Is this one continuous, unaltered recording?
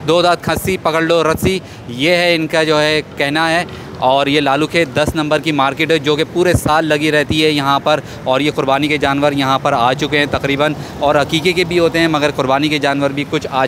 yes; 0 cuts

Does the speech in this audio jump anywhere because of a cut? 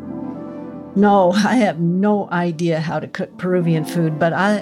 yes; 1 cut; at 0.9 s

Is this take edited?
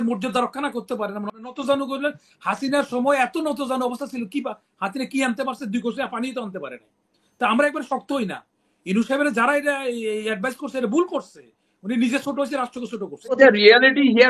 yes; 2 cuts; at 1.4 s, 13.4 s

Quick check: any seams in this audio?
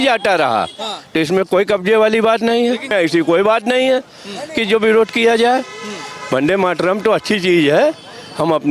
yes; 1 cut; at 2.9 s

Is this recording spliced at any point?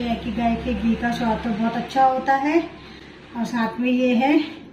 no; 0 cuts

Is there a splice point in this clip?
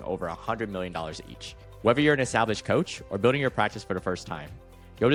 no; 0 cuts

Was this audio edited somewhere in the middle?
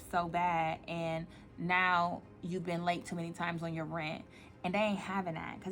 no; 0 cuts

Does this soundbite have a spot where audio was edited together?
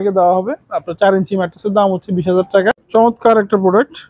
yes; 1 cut; at 2.7 s

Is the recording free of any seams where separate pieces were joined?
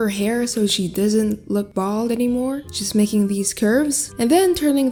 yes; 0 cuts

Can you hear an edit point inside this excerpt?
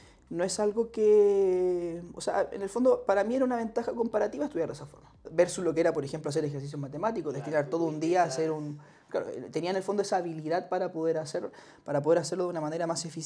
yes; 1 cut; at 5.2 s

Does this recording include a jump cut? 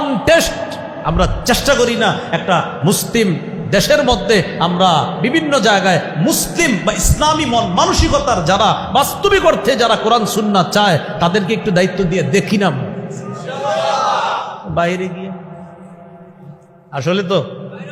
no; 0 cuts

